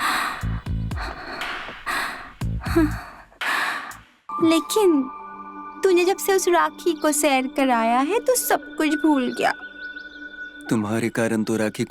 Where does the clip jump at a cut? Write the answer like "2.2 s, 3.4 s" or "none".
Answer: 4.2 s